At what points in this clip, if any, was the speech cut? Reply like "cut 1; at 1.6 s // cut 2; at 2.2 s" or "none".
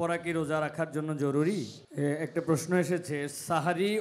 cut 1; at 1.8 s